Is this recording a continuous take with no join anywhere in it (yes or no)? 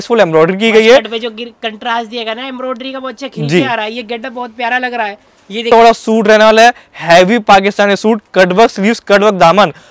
no